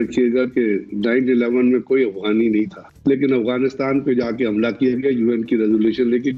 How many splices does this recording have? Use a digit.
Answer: 1